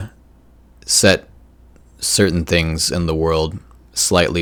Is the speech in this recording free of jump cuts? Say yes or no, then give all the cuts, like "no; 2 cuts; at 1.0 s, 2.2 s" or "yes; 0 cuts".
yes; 0 cuts